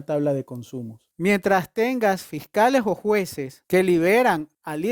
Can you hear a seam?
yes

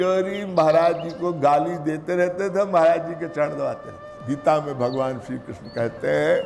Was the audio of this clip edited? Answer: yes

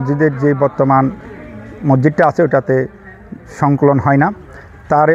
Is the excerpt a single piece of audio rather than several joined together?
yes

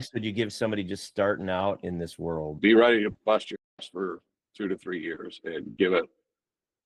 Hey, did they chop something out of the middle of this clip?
yes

